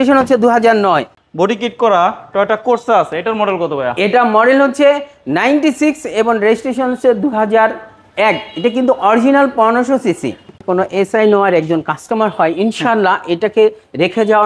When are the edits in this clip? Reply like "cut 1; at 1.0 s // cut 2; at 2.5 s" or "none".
cut 1; at 1.2 s // cut 2; at 10.6 s